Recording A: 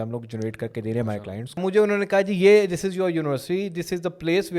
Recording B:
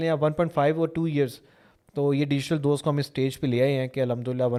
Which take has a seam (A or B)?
A